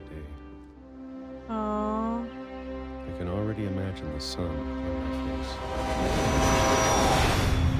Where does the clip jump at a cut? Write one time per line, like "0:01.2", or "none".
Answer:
none